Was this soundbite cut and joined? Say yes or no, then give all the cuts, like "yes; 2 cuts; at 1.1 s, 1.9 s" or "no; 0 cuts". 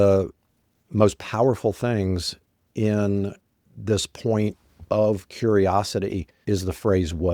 yes; 1 cut; at 6.3 s